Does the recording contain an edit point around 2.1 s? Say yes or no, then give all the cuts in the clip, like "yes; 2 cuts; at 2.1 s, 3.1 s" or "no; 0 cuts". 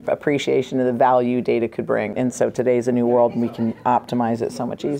yes; 1 cut; at 2.1 s